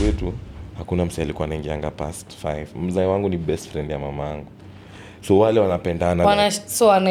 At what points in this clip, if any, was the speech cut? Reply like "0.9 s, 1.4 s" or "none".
none